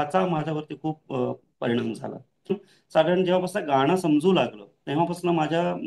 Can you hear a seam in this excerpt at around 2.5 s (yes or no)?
yes